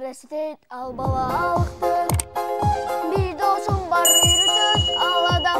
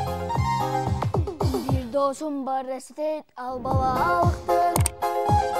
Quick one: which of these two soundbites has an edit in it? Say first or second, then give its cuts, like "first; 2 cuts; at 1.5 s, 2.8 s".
second; 1 cut; at 1.0 s